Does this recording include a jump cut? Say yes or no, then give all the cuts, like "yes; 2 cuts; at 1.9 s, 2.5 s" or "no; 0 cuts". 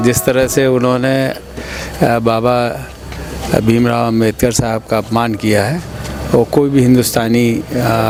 no; 0 cuts